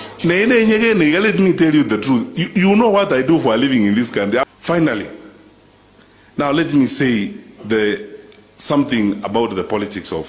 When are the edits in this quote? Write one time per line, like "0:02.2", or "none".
0:04.5